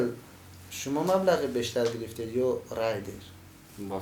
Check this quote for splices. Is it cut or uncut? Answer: uncut